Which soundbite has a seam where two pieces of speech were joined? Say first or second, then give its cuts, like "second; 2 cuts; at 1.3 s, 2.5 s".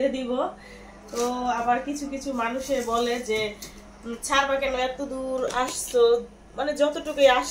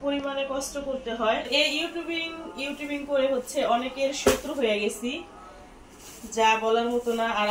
second; 1 cut; at 1.5 s